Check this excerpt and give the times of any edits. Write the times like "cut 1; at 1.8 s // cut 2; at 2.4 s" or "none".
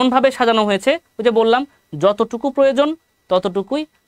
none